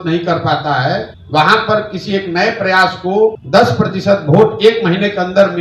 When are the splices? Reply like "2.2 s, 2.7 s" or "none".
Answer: 1.1 s, 3.4 s